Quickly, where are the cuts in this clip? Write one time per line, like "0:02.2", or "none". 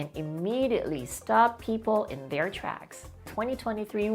0:03.2

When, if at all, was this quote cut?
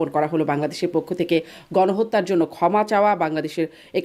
none

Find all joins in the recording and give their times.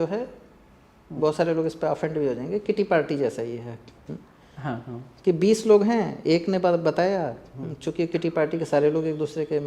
none

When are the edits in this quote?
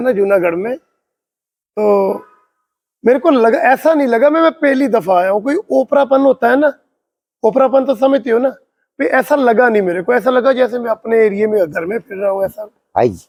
none

